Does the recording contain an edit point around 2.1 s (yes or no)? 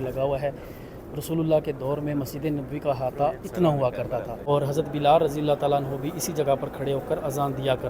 no